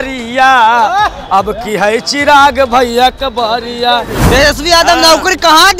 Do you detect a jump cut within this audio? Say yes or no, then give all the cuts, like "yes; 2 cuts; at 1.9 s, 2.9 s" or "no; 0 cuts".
yes; 1 cut; at 4.2 s